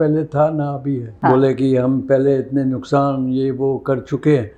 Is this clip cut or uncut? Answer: cut